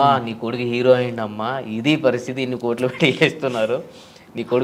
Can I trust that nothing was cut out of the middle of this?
yes; 0 cuts

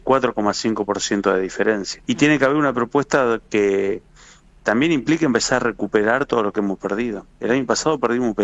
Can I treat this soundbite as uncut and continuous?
no; 1 cut; at 1.9 s

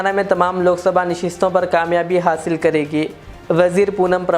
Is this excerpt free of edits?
yes; 0 cuts

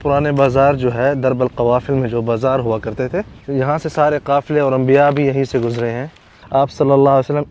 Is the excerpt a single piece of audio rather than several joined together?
no; 2 cuts; at 3.4 s, 6.4 s

